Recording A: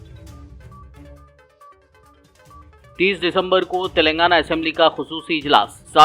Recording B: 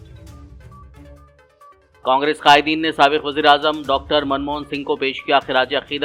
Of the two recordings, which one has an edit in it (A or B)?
A